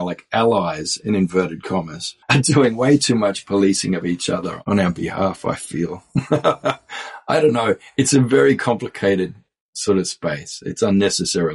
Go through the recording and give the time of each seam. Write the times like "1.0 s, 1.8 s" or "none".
4.5 s